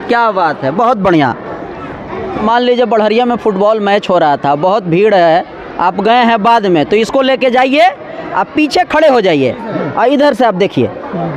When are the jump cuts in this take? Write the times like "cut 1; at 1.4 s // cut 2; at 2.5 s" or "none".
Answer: cut 1; at 2.4 s